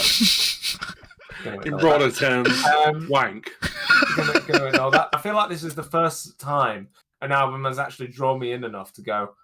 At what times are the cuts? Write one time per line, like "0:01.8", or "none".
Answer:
0:05.1